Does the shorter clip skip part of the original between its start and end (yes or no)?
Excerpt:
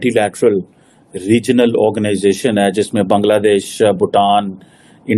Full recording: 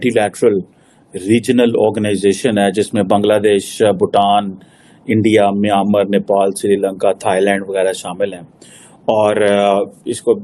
no